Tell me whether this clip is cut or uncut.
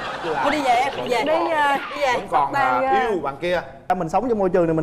cut